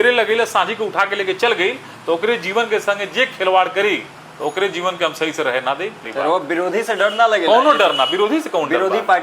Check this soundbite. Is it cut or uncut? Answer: cut